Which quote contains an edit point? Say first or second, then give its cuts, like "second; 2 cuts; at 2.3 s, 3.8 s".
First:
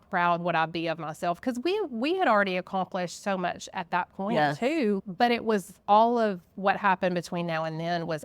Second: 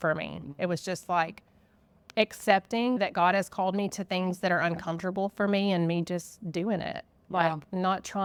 first; 1 cut; at 5.7 s